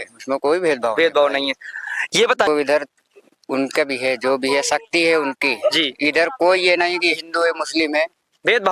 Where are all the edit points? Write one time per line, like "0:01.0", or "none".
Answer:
0:02.5